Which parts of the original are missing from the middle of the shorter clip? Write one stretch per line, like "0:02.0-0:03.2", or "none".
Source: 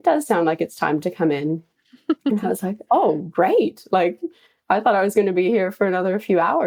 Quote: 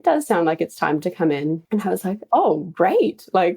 0:01.7-0:02.3